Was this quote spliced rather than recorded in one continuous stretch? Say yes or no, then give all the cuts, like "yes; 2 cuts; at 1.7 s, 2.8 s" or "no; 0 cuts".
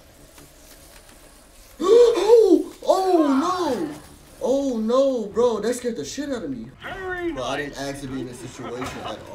yes; 1 cut; at 6.7 s